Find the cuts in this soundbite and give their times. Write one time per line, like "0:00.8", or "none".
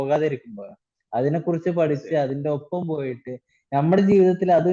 none